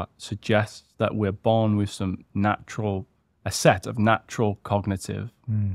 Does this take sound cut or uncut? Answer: uncut